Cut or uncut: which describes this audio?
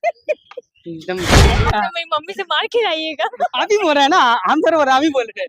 cut